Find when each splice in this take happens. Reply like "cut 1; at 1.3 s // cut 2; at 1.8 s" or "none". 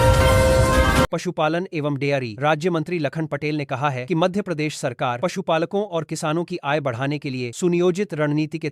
cut 1; at 1.2 s

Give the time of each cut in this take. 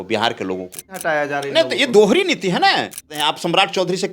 cut 1; at 1.0 s // cut 2; at 3.1 s

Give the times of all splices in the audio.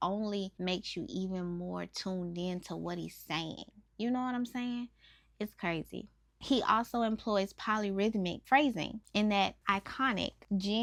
none

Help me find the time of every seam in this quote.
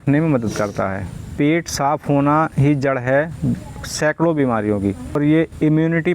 cut 1; at 1.2 s // cut 2; at 5.2 s

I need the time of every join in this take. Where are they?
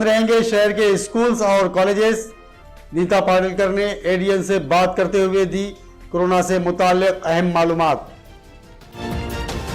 none

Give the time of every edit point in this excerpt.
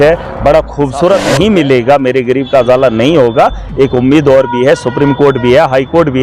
cut 1; at 1.0 s

